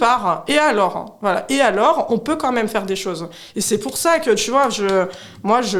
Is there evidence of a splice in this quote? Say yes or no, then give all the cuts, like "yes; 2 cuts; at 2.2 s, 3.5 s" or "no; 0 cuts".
no; 0 cuts